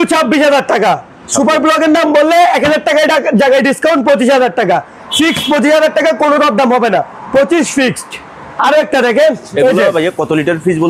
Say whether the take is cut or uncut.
uncut